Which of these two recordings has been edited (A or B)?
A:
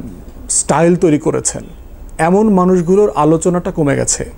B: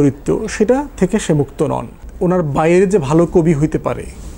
B